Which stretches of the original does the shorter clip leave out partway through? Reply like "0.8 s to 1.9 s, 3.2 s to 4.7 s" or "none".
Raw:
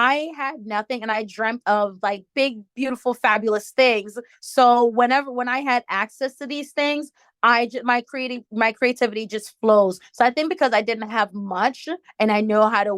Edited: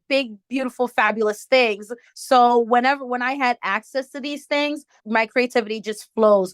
7.2 s to 8.4 s